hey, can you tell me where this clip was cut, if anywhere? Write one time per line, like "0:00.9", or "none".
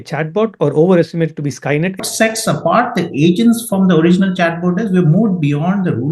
0:02.1